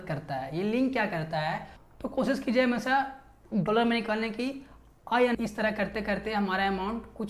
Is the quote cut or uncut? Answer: cut